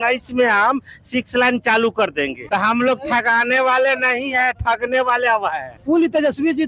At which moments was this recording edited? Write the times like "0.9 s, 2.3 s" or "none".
2.4 s, 5.8 s